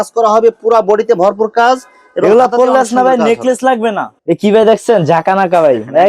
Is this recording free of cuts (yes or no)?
no